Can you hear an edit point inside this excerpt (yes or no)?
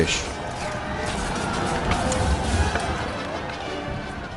no